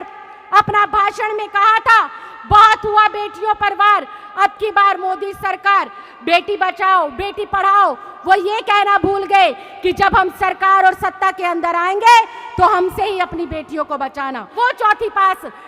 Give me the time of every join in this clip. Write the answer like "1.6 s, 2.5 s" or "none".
14.5 s